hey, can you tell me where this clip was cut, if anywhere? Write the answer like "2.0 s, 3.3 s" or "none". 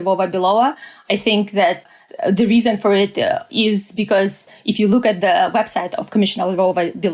1.8 s, 3.5 s